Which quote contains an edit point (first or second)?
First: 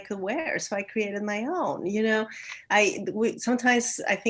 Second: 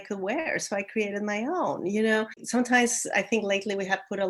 second